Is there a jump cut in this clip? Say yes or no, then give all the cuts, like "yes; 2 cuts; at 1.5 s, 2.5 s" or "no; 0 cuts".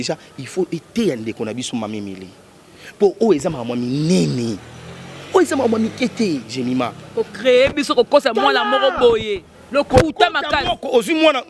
no; 0 cuts